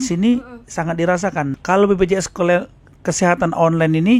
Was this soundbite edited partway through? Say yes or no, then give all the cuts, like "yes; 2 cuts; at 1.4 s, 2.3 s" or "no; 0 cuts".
yes; 1 cut; at 1.6 s